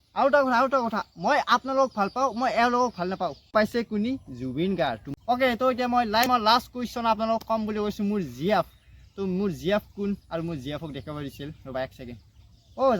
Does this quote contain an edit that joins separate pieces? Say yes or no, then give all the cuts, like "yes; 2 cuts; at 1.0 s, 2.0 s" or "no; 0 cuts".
yes; 3 cuts; at 3.4 s, 5.1 s, 6.2 s